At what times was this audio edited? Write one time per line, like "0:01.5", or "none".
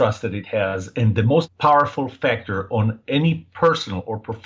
0:01.3